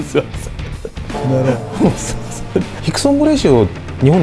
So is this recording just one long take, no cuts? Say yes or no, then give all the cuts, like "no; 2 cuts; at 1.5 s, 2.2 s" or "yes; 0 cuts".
no; 1 cut; at 2.8 s